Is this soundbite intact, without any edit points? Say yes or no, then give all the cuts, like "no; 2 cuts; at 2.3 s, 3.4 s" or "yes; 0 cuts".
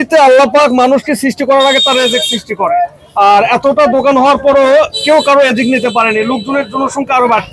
yes; 0 cuts